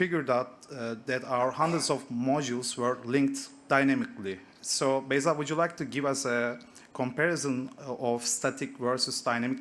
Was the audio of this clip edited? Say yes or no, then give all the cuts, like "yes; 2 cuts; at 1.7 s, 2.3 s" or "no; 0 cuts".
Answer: no; 0 cuts